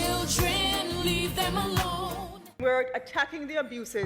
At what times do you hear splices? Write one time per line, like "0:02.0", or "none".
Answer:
0:02.4